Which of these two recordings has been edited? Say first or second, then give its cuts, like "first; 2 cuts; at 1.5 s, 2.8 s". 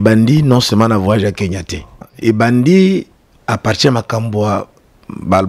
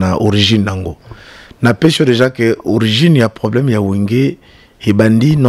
first; 1 cut; at 2.1 s